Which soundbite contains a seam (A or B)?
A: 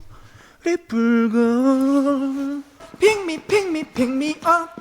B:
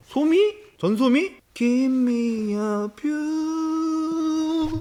A